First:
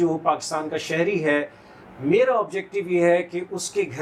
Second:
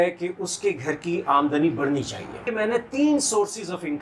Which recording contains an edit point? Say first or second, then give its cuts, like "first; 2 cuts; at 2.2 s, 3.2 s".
second; 1 cut; at 2.4 s